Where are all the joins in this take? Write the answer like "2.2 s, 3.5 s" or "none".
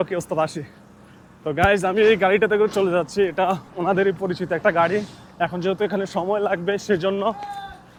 none

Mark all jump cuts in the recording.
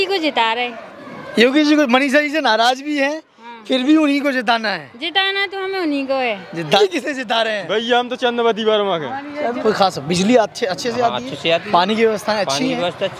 6.8 s, 9.6 s

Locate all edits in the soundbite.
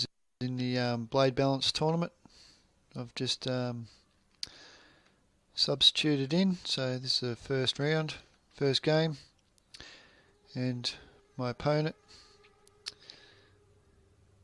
10.6 s

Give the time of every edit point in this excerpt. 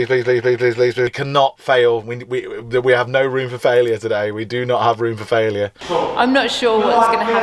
1.1 s, 5.8 s

